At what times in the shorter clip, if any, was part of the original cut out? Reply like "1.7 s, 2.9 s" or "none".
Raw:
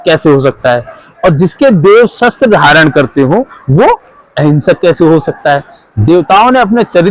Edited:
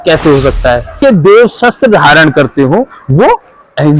0.9 s